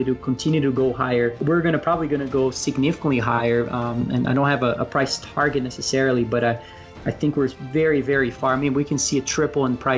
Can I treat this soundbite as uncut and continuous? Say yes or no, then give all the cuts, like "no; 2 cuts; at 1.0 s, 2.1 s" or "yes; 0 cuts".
no; 1 cut; at 1.4 s